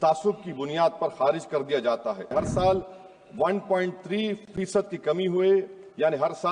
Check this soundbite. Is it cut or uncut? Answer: cut